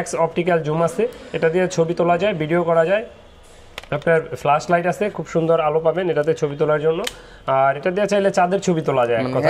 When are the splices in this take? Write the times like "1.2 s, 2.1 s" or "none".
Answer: none

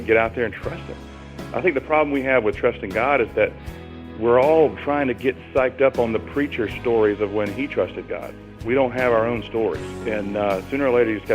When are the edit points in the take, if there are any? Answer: 9.9 s

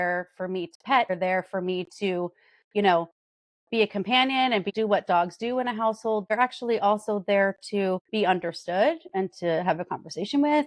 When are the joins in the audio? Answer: 1.1 s

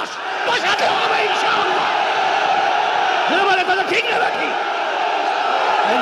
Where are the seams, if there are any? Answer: none

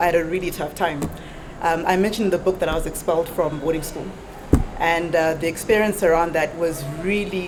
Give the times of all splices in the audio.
none

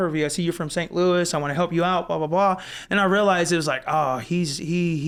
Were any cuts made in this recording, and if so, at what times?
none

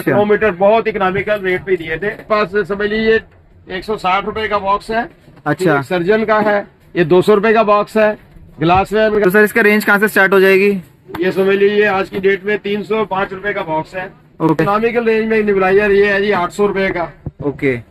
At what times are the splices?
2.3 s, 9.2 s, 14.6 s

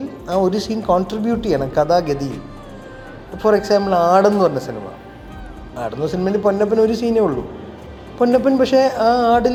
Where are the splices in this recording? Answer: none

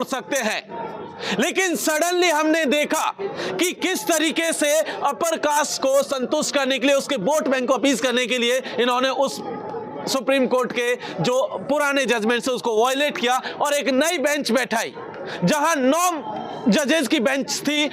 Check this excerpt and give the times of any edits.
none

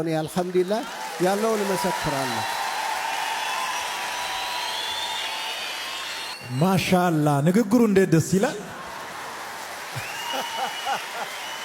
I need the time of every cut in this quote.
none

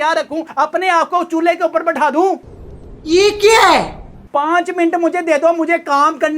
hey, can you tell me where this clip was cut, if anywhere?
none

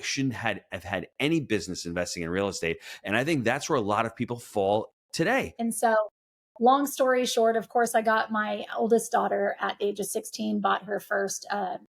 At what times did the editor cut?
5.8 s

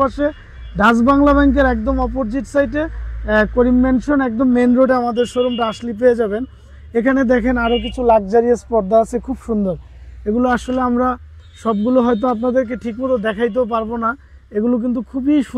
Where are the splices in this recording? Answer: none

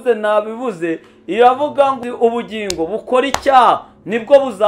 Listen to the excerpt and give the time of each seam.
2.0 s

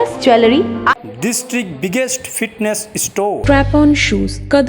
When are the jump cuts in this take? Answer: 1.0 s

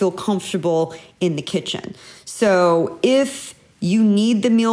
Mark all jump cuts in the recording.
none

